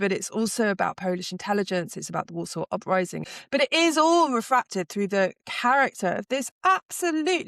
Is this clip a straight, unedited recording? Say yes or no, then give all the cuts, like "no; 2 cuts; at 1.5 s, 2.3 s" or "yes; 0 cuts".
no; 1 cut; at 3.3 s